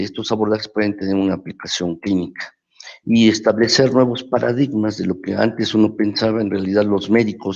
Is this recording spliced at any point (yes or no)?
yes